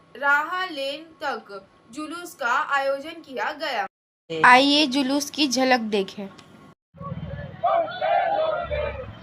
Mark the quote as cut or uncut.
uncut